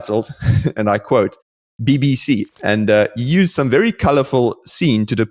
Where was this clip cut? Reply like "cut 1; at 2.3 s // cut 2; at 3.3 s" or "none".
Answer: cut 1; at 2.5 s